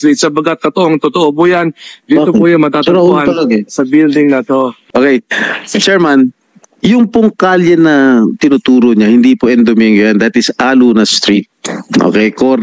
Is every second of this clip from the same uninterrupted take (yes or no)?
no